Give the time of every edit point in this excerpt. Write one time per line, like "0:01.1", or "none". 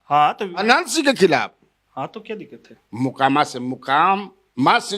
0:02.8